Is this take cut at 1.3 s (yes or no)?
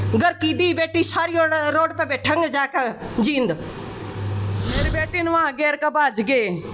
no